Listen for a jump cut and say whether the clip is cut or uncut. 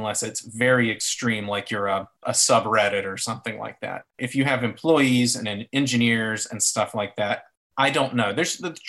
cut